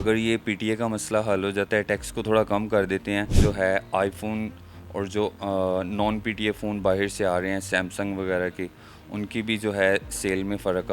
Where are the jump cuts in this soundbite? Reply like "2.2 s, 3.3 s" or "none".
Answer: 3.3 s